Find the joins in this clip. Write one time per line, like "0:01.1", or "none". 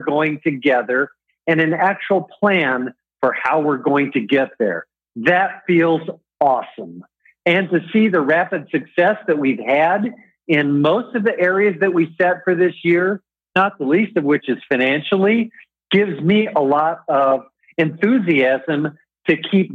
none